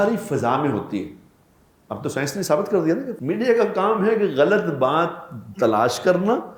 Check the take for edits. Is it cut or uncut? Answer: cut